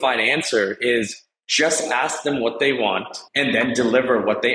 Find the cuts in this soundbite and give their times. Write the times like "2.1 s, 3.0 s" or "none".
3.2 s